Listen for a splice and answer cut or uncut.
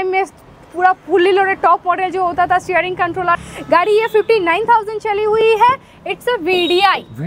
cut